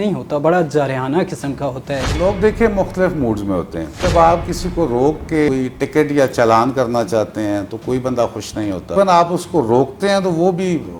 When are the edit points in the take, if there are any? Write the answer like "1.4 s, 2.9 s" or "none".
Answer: 2.1 s, 3.9 s, 5.5 s, 8.9 s